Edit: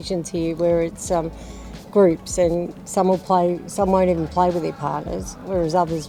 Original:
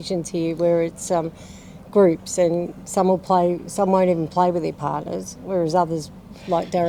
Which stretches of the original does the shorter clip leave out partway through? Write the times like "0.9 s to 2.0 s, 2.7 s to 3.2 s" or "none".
none